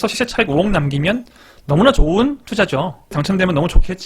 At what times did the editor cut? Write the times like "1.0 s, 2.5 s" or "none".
3.1 s